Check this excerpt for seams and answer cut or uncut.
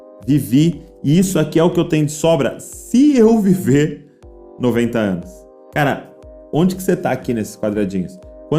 uncut